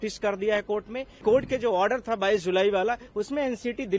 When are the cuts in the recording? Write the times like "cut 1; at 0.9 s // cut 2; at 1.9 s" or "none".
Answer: cut 1; at 1.2 s